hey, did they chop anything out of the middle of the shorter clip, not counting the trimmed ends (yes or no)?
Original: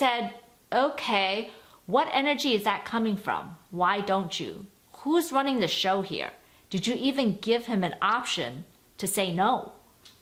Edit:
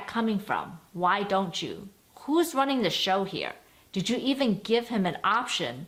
no